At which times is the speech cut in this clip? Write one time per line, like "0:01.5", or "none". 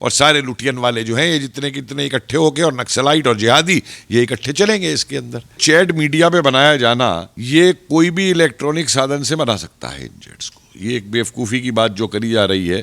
0:05.6
0:07.3